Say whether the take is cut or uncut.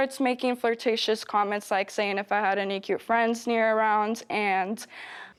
uncut